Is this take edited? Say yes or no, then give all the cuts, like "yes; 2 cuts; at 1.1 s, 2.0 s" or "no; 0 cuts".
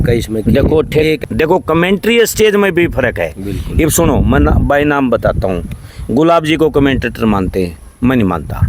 yes; 1 cut; at 1.2 s